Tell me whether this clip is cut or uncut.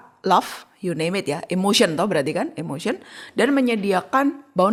uncut